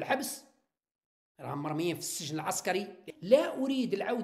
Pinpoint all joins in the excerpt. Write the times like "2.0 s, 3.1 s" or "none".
3.1 s